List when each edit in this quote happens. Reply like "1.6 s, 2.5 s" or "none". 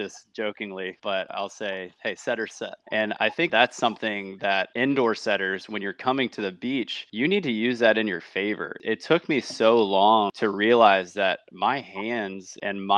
1.3 s